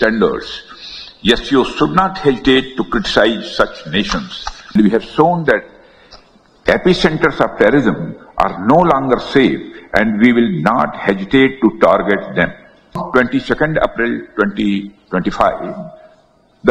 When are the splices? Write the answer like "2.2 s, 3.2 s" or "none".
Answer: 4.7 s, 13.0 s